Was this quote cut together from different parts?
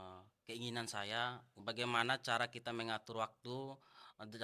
yes; 1 cut; at 1.5 s

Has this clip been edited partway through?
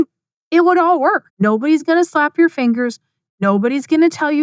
yes; 1 cut; at 1.3 s

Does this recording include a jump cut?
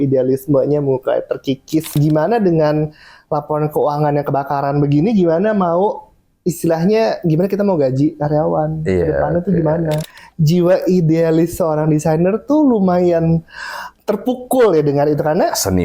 yes; 2 cuts; at 2.0 s, 10.0 s

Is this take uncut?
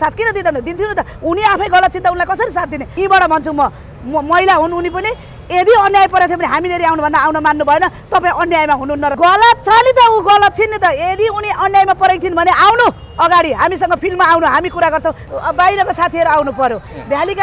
no; 3 cuts; at 2.9 s, 9.1 s, 15.2 s

